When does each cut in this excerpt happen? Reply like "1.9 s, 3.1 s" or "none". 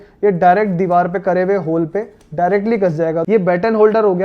3.2 s

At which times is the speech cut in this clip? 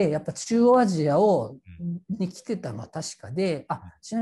none

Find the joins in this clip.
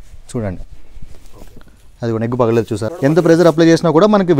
2.9 s

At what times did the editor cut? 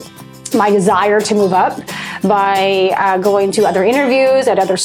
none

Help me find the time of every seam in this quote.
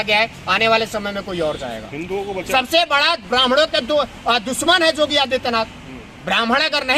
2.5 s

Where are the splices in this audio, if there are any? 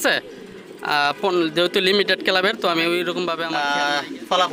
3.5 s

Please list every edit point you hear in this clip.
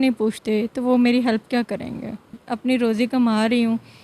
2.4 s

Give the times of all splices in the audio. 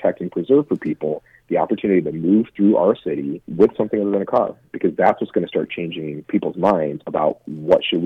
3.4 s, 6.1 s, 7.0 s

